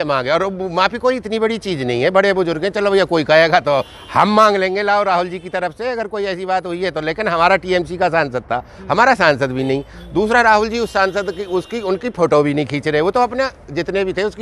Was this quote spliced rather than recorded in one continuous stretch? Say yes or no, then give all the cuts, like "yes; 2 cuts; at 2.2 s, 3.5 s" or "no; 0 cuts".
no; 0 cuts